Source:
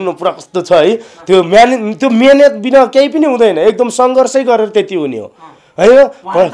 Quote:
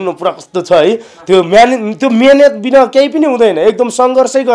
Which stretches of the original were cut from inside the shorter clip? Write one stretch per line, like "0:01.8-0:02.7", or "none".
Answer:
none